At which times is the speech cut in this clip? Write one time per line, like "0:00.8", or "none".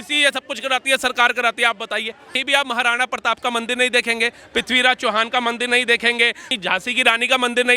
0:02.4
0:06.5